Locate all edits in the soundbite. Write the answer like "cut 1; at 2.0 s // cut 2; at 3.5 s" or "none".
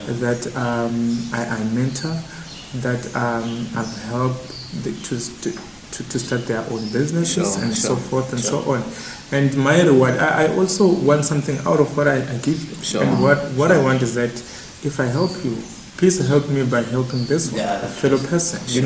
none

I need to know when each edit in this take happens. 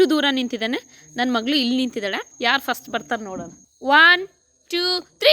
cut 1; at 2.2 s

